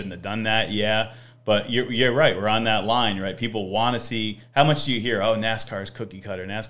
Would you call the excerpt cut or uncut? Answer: uncut